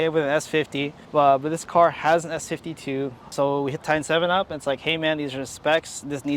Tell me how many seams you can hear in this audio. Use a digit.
1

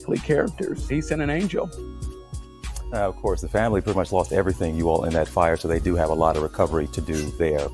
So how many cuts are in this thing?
0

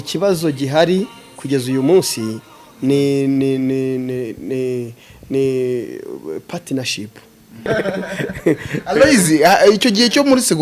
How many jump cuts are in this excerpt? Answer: 1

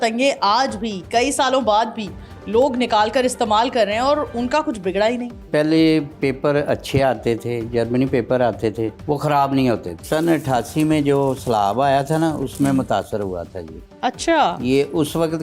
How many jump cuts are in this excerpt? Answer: 3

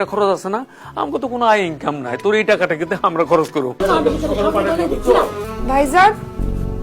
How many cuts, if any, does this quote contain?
2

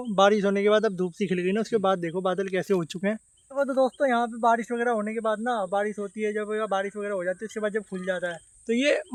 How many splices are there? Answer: 0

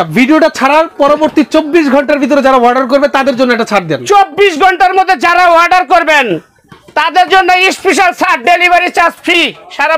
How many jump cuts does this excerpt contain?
0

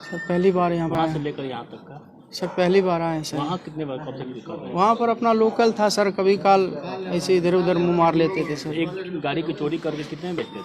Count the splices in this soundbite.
1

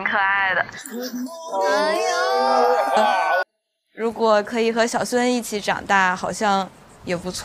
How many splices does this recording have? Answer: 1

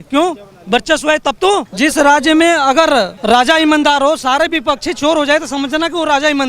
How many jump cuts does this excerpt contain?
2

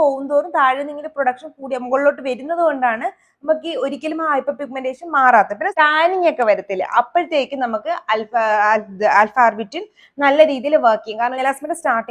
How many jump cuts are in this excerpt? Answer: 2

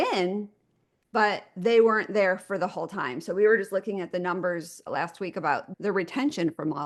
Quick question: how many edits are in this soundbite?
0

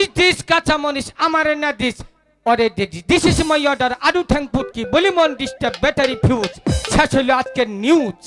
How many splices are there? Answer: 0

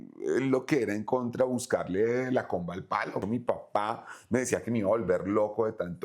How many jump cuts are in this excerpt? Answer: 1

